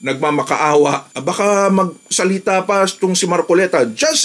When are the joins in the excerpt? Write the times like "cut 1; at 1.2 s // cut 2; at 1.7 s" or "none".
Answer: cut 1; at 1.1 s